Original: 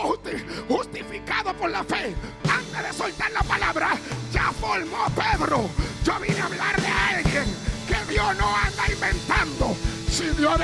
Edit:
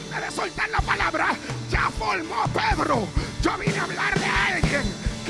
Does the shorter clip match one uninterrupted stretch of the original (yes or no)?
yes